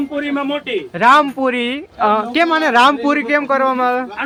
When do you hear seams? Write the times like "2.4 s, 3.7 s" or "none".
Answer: none